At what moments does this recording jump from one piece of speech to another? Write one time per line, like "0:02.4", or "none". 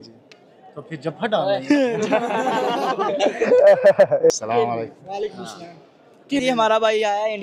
0:04.3
0:06.4